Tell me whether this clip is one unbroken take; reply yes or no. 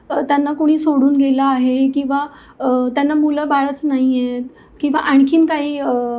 yes